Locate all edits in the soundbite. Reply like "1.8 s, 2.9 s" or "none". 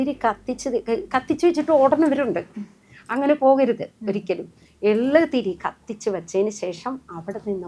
none

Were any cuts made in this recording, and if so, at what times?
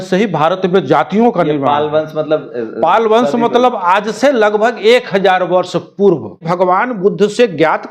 6.5 s

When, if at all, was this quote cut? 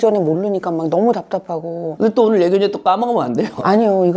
none

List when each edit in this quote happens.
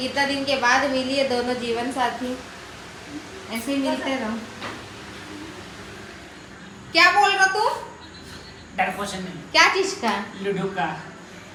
none

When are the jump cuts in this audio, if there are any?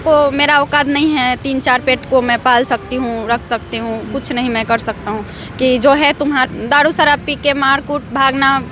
6.4 s

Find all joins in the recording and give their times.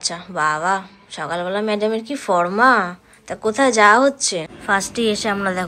4.5 s

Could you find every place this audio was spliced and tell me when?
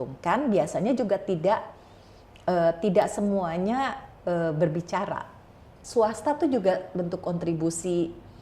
5.8 s

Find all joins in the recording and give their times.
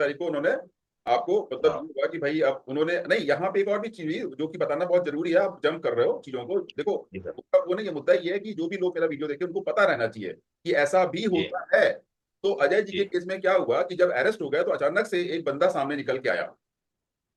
none

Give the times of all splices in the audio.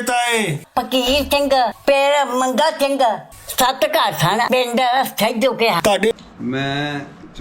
6.2 s

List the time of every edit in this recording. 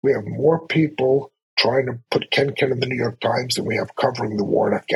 none

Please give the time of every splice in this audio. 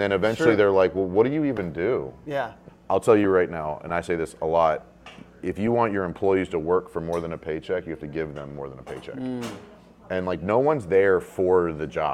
2.6 s

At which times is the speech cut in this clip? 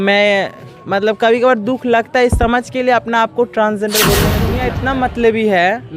4.5 s

